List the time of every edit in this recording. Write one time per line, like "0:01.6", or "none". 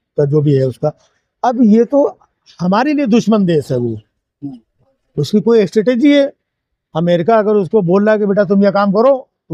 none